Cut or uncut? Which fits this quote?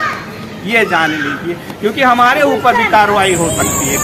uncut